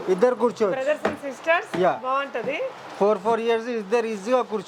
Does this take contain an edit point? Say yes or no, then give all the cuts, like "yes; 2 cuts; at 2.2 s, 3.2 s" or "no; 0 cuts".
no; 0 cuts